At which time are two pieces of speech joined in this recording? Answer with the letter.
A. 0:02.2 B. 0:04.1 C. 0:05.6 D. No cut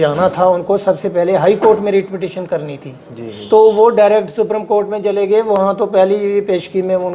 D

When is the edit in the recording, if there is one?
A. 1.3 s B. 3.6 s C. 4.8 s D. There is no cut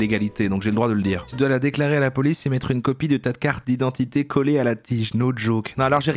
A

